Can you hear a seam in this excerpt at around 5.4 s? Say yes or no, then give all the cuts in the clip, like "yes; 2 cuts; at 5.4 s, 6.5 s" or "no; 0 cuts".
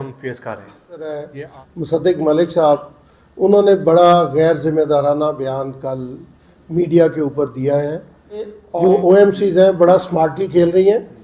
no; 2 cuts; at 1.2 s, 8.6 s